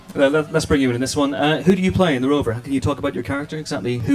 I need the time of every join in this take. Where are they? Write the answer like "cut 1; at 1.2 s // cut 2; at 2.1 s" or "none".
none